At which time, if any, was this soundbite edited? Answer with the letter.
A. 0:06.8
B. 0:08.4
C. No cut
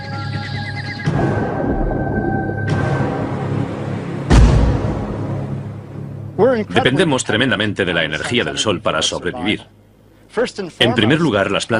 B